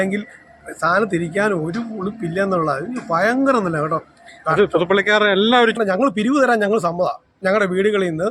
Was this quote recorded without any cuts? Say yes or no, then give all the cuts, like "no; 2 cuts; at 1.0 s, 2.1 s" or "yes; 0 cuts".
no; 1 cut; at 5.8 s